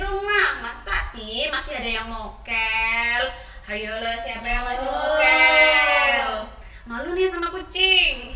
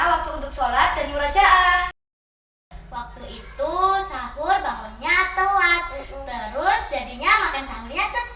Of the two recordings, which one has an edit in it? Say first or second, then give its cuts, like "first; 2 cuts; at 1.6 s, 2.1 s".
second; 1 cut; at 2.5 s